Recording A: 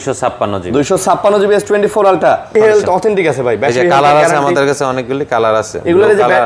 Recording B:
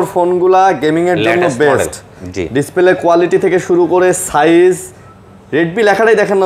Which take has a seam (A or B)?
A